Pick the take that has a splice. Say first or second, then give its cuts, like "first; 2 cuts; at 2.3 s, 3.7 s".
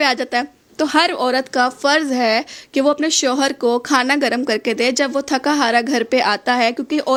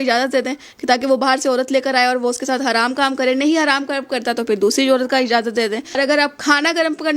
second; 1 cut; at 6.0 s